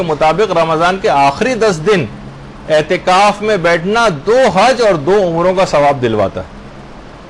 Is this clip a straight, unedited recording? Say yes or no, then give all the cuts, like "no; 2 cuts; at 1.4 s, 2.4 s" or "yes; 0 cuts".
yes; 0 cuts